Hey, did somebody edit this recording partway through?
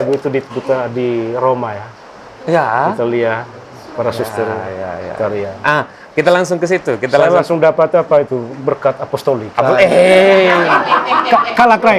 no; 0 cuts

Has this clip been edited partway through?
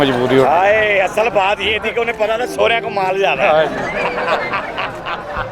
no; 0 cuts

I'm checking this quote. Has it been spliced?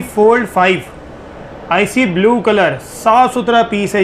no; 0 cuts

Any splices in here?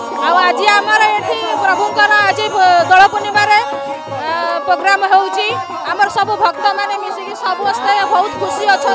no; 0 cuts

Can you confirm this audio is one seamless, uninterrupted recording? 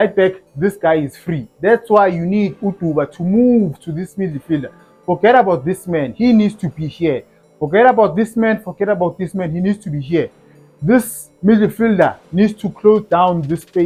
yes; 0 cuts

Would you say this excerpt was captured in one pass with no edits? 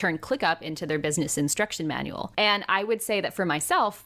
no; 1 cut; at 2.2 s

